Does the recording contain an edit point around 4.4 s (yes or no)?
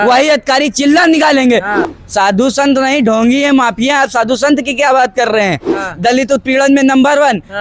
no